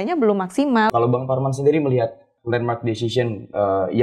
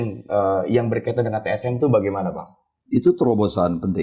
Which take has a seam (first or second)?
first